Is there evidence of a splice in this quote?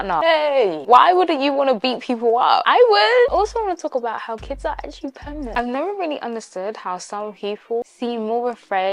yes; 3 cuts; at 3.3 s, 5.6 s, 7.9 s

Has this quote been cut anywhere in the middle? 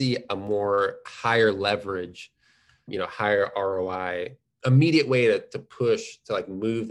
yes; 1 cut; at 2.9 s

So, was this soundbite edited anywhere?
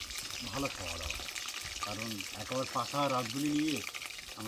no; 0 cuts

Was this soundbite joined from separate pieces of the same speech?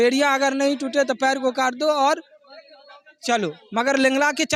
no; 0 cuts

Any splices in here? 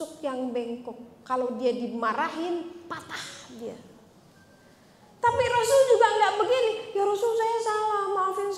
no; 0 cuts

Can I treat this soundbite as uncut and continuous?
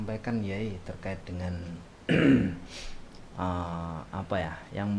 yes; 0 cuts

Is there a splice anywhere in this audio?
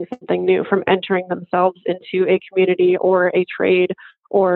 no; 0 cuts

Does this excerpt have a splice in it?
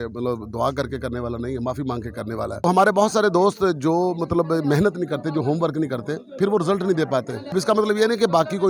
yes; 2 cuts; at 2.6 s, 7.5 s

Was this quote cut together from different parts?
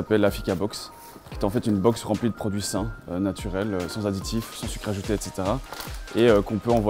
no; 0 cuts

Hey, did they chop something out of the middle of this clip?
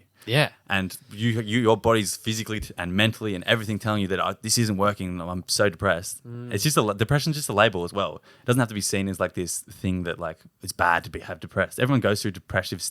no; 0 cuts

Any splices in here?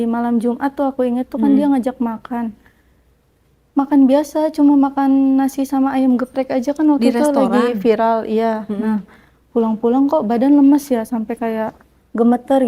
no; 0 cuts

